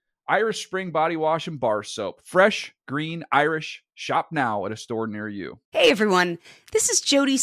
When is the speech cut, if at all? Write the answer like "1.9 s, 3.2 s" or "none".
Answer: 5.6 s